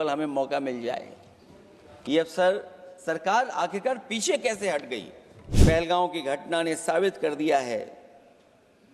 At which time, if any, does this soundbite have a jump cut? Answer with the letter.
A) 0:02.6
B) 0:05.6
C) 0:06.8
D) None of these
B